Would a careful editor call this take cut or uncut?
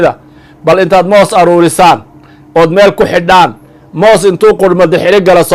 uncut